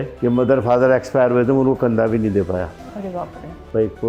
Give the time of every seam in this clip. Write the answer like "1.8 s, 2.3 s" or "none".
none